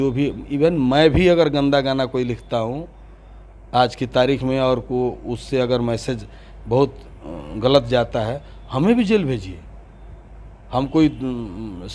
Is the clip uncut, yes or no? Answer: yes